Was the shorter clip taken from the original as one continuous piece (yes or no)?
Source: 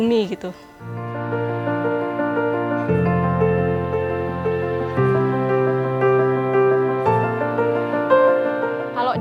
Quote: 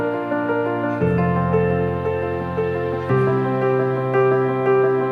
yes